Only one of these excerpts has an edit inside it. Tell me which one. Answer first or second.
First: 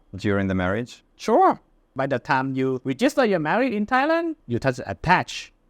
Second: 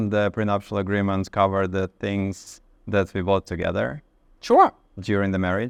first